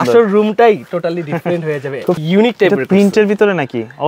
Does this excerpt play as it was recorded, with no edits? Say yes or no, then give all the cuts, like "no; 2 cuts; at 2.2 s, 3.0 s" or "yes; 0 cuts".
no; 1 cut; at 2.2 s